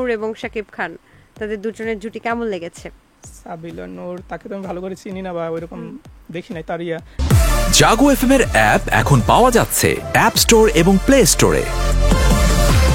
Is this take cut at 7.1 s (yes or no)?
yes